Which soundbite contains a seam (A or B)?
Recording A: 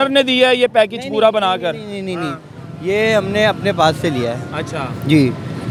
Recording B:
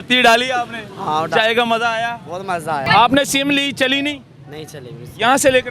B